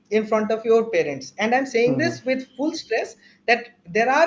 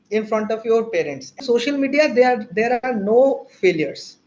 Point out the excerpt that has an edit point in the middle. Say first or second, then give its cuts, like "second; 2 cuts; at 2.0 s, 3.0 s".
second; 1 cut; at 1.4 s